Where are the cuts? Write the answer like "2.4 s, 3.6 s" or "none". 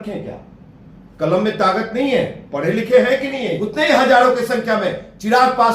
3.6 s

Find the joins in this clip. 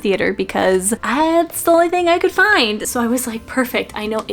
1.0 s, 2.9 s

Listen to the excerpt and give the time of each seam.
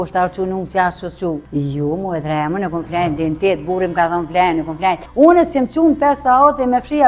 1.4 s, 5.0 s

